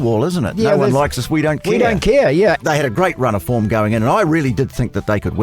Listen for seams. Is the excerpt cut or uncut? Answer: cut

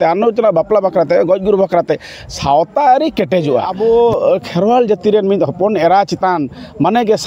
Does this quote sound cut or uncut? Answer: cut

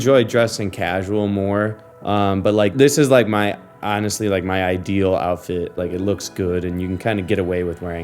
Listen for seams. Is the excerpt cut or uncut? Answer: cut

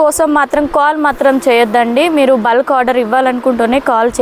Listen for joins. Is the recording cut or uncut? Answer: uncut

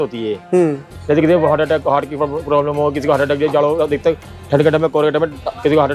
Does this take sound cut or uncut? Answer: uncut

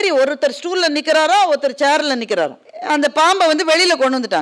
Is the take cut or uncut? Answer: cut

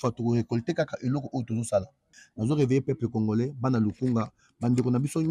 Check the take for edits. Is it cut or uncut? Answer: cut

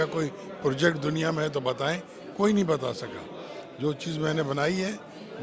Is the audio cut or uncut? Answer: uncut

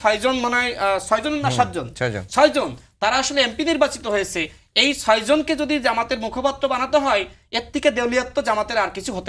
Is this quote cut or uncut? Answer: uncut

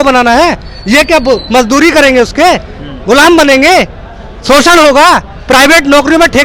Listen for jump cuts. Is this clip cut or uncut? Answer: uncut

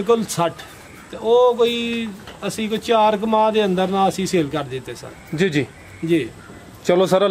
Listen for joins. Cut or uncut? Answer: uncut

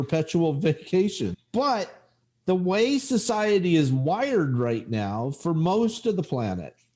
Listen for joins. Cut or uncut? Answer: cut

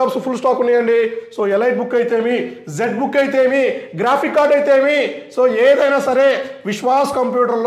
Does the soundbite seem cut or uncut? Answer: uncut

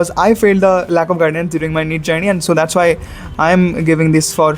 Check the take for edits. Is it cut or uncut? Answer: uncut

